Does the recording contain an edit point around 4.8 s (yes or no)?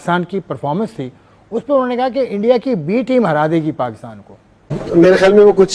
yes